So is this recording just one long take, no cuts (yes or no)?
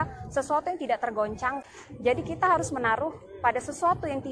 no